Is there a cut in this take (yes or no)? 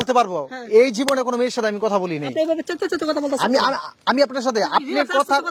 no